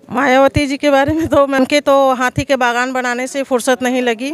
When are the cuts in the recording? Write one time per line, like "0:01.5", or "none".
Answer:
0:01.6